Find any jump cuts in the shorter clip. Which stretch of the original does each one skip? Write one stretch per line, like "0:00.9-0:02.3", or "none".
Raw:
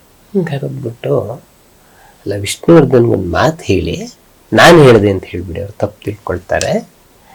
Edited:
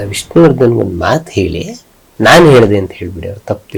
none